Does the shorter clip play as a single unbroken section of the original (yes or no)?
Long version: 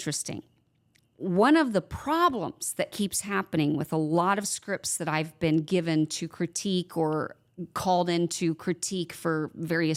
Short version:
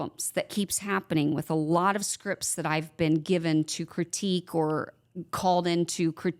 yes